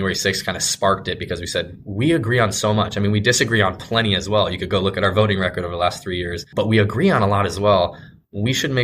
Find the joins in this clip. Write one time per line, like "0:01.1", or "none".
0:06.4